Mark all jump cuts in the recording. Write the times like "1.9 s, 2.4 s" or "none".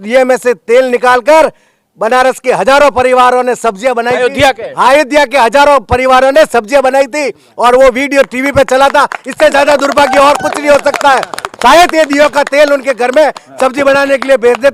none